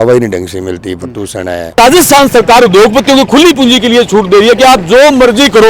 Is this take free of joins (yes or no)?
no